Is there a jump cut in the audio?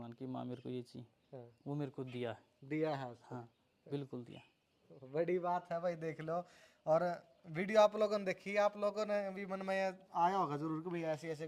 no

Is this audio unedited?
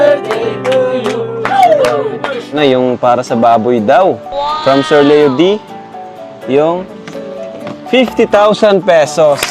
no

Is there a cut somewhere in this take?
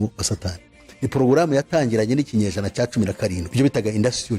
yes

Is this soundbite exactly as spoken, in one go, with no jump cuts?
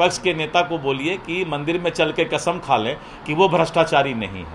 yes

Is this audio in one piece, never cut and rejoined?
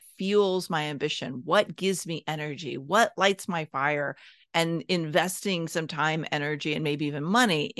yes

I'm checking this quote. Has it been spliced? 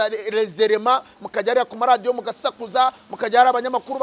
no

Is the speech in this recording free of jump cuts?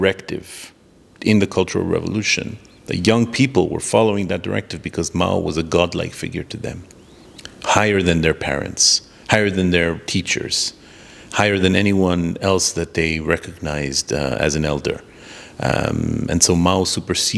yes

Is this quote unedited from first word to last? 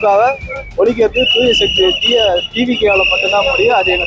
yes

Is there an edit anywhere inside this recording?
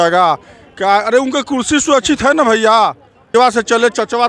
yes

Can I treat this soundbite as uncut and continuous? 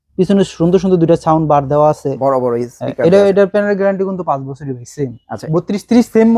no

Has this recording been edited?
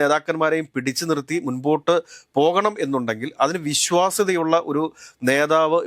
no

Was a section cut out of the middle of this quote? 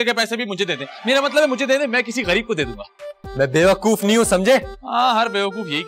no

